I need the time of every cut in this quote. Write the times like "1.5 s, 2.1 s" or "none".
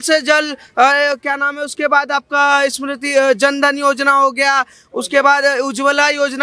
none